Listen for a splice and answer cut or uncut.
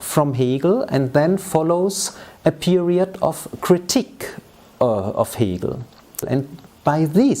cut